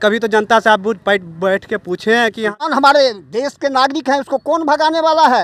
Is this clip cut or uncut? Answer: cut